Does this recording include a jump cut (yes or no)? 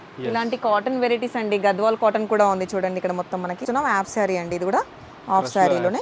yes